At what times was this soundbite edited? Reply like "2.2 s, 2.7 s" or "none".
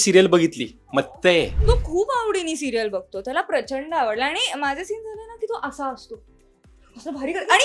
1.6 s